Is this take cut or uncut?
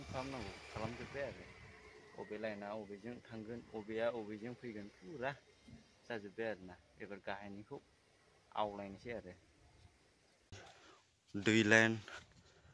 cut